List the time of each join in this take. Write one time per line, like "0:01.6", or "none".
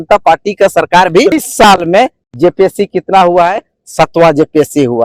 0:01.3